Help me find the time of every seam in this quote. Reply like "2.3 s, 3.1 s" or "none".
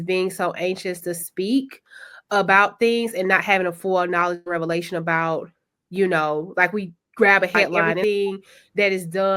8.0 s